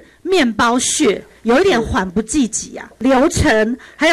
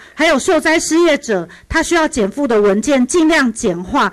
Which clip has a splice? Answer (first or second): first